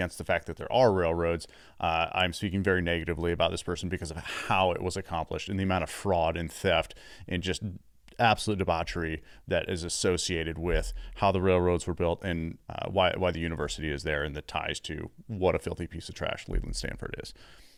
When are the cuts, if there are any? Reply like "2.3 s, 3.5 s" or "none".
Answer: none